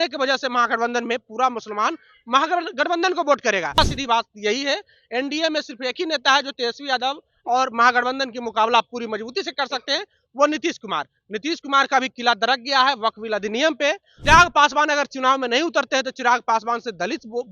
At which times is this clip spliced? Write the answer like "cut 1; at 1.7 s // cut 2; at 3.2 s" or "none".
cut 1; at 3.8 s // cut 2; at 14.1 s